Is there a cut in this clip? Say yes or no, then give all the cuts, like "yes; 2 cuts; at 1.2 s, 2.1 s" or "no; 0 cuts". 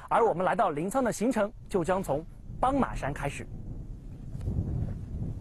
yes; 1 cut; at 3.5 s